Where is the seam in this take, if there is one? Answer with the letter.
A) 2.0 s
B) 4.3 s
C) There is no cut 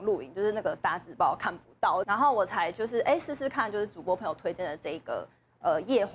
A